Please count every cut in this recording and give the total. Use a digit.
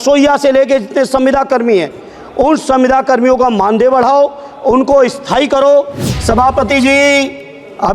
1